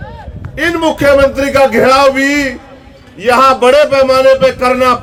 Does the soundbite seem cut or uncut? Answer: uncut